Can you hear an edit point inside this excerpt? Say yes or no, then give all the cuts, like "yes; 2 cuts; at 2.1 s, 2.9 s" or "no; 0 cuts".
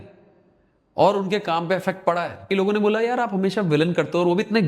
yes; 1 cut; at 2.5 s